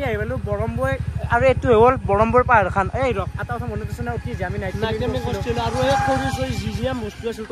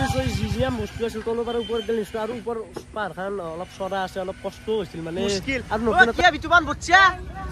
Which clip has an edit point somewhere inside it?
second; 1 cut; at 5.9 s

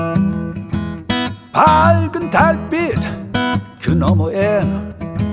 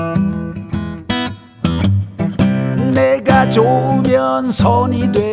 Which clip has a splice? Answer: first; 1 cut; at 1.4 s

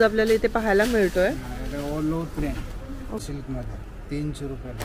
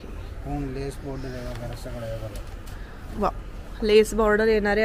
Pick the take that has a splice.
first; 1 cut; at 3.3 s

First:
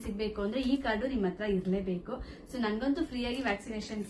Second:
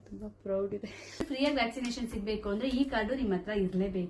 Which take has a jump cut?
second; 1 cut; at 1.1 s

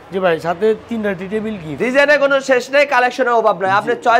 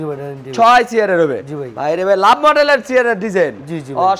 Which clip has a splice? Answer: first; 1 cut; at 1.7 s

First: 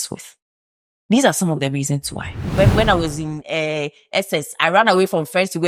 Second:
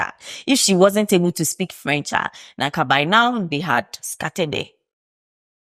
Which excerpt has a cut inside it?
first; 1 cut; at 2.4 s

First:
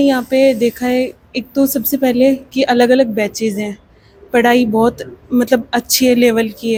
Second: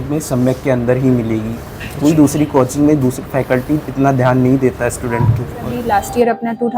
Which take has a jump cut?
second; 1 cut; at 5.7 s

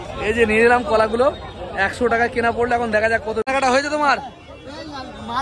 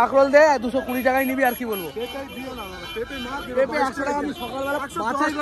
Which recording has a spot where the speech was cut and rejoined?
first; 1 cut; at 3.5 s

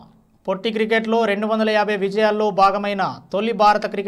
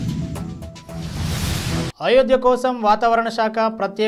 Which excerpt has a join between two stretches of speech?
second; 1 cut; at 1.9 s

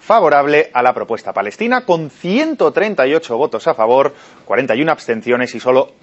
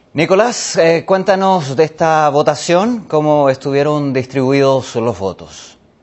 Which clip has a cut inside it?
first; 1 cut; at 4.7 s

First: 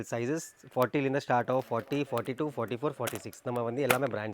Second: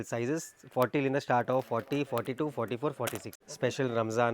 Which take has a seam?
second; 1 cut; at 3.3 s

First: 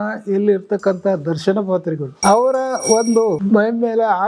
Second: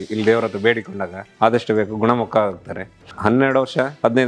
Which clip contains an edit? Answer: first; 2 cuts; at 2.1 s, 3.4 s

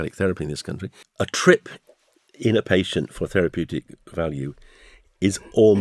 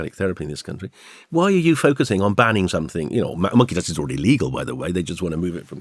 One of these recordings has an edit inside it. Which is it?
first; 1 cut; at 1.0 s

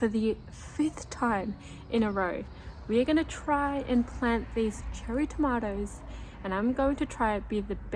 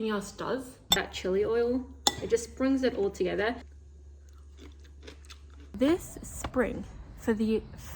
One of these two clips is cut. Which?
second; 3 cuts; at 0.8 s, 3.7 s, 5.6 s

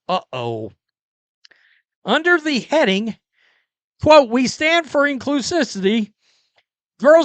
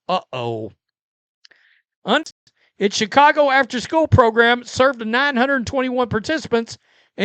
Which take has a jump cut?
second; 1 cut; at 2.3 s

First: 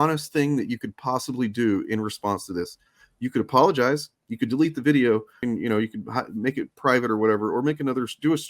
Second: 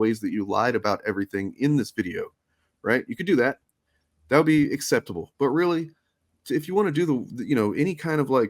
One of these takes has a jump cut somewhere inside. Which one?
first; 1 cut; at 5.4 s

